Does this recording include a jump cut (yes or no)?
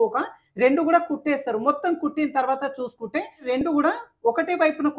yes